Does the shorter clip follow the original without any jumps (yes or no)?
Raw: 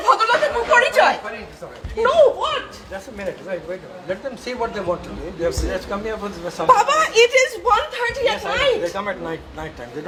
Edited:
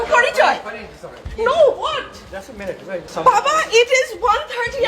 no